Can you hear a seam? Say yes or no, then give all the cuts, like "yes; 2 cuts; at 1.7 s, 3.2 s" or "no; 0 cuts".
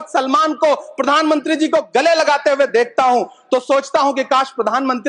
no; 0 cuts